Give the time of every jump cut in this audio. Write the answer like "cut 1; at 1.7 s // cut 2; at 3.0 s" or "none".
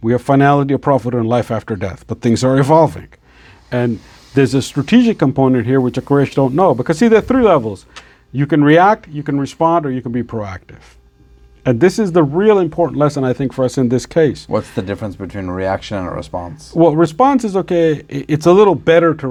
none